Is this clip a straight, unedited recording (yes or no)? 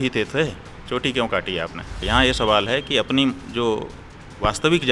no